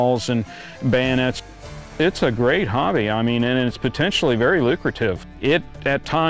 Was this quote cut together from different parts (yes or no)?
yes